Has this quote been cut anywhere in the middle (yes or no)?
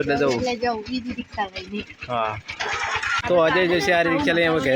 no